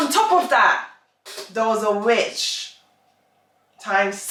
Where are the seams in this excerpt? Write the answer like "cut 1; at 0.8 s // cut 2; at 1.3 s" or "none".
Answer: none

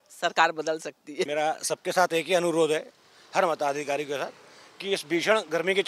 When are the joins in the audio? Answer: cut 1; at 1.3 s

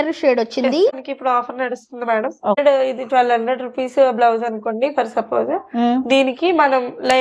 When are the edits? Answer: cut 1; at 1.0 s // cut 2; at 2.7 s

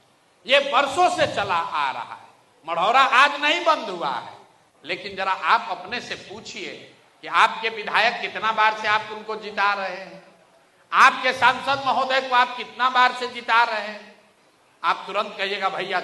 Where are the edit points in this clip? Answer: none

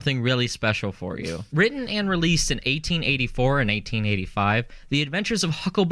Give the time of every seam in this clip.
cut 1; at 4.8 s

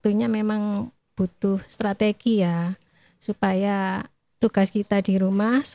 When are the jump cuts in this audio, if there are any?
none

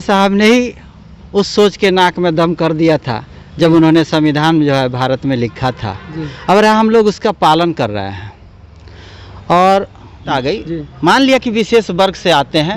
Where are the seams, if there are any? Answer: cut 1; at 10.3 s

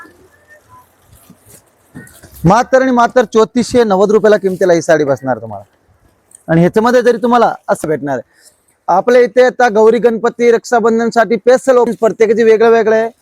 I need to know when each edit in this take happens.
cut 1; at 7.8 s // cut 2; at 11.9 s

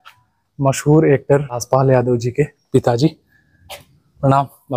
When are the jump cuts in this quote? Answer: cut 1; at 1.6 s

